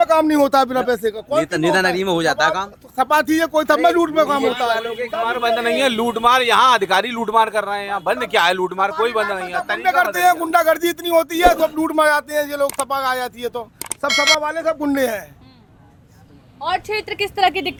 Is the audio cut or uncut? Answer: uncut